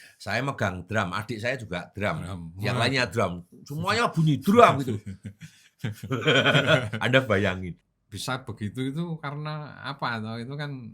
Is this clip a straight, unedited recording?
no; 1 cut; at 7.8 s

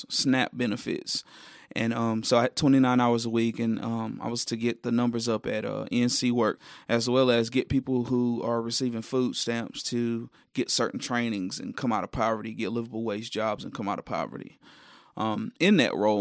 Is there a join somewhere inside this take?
yes; 1 cut; at 6.7 s

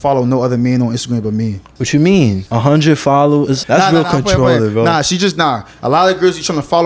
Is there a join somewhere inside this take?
yes; 3 cuts; at 1.7 s, 2.4 s, 3.6 s

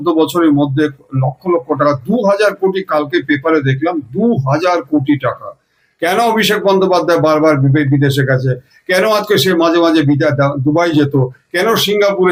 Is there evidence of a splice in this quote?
no; 0 cuts

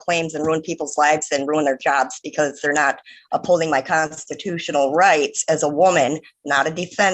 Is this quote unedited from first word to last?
yes; 0 cuts

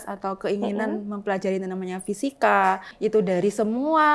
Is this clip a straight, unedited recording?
no; 1 cut; at 2.9 s

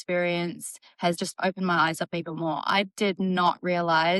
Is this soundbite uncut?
no; 1 cut; at 1.2 s

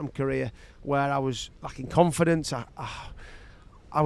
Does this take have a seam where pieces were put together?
no; 0 cuts

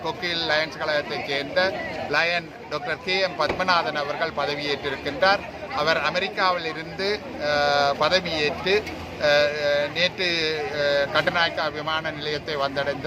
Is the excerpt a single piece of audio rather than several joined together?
yes; 0 cuts

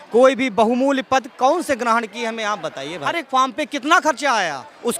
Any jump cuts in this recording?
yes; 1 cut; at 3.1 s

